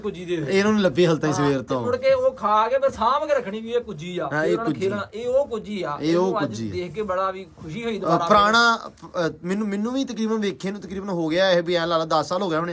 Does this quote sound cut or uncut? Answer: uncut